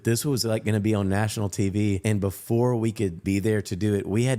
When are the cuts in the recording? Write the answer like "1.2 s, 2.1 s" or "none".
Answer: 2.0 s